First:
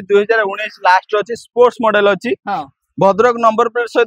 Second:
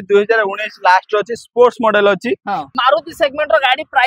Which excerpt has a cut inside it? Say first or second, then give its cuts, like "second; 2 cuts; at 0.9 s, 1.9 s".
second; 1 cut; at 2.7 s